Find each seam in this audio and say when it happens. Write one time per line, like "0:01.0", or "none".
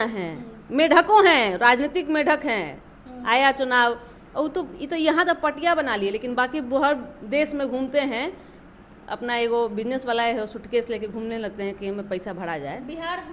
none